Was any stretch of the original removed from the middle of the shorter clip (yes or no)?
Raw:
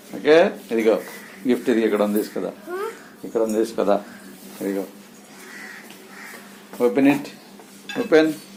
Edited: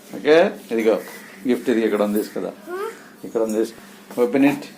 yes